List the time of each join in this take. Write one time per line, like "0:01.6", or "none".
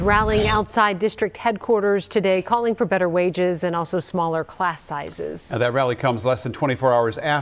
none